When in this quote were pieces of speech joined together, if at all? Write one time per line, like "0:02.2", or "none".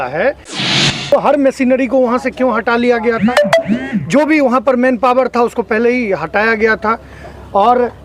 0:00.9